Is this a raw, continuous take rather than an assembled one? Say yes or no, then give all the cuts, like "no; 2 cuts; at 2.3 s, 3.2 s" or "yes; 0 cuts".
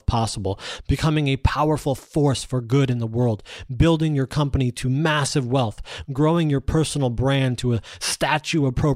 yes; 0 cuts